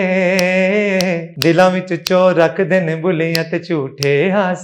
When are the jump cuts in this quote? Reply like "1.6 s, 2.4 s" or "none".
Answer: 1.3 s